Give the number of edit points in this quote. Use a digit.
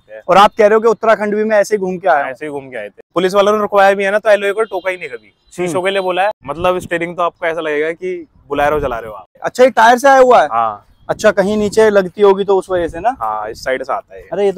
3